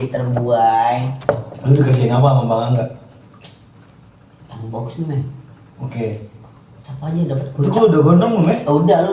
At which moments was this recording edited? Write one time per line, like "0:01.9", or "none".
0:01.3